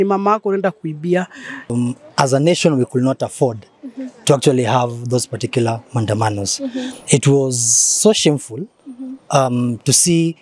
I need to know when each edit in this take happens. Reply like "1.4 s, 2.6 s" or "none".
1.7 s